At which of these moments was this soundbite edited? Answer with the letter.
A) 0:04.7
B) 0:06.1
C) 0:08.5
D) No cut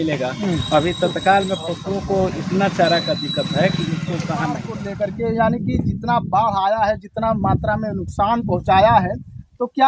A